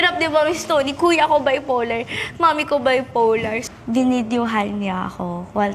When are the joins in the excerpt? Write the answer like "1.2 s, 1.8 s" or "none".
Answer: 3.6 s

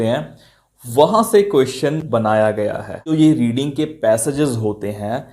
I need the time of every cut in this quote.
3.1 s

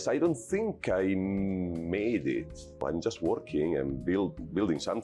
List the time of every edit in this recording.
2.8 s

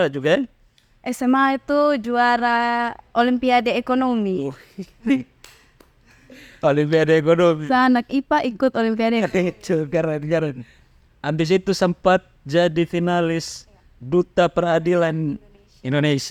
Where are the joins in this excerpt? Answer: none

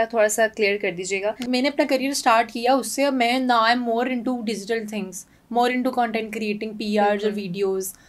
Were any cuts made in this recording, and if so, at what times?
1.5 s

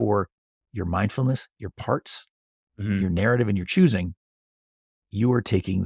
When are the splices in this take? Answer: none

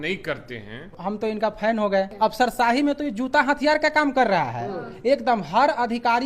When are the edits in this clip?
0.9 s, 2.1 s

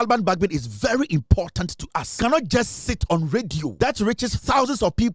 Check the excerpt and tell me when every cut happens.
2.2 s, 3.7 s

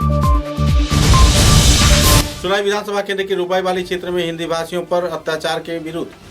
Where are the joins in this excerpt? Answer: 2.3 s

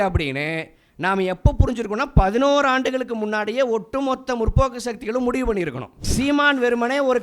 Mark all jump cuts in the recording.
6.0 s

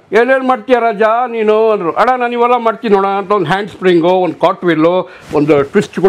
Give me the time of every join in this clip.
none

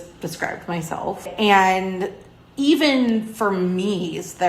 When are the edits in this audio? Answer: 1.2 s

